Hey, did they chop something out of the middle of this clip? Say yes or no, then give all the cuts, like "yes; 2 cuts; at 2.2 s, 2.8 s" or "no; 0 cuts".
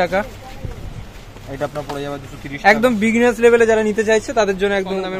no; 0 cuts